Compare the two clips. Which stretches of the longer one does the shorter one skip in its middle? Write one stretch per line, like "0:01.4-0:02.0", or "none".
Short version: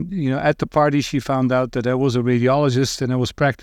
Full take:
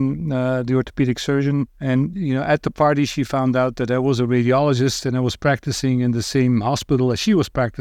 none